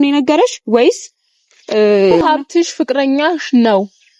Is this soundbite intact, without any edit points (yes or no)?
no